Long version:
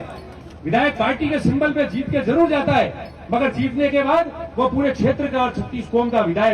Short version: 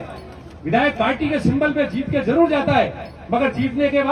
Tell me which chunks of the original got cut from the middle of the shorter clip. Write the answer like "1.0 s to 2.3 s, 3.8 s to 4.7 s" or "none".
none